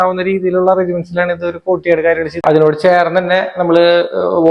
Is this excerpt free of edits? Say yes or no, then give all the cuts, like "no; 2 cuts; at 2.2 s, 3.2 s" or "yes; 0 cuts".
no; 1 cut; at 2.4 s